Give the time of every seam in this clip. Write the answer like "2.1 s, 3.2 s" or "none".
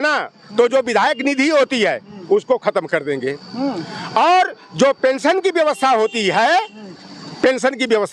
none